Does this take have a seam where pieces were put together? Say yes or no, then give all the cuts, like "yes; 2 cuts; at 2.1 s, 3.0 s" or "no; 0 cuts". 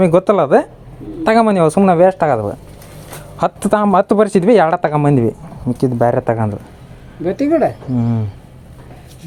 no; 0 cuts